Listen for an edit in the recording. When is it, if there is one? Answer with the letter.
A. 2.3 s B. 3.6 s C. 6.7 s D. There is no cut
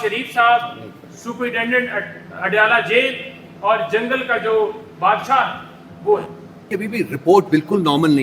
C